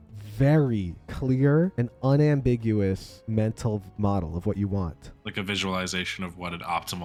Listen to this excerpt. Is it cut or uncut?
uncut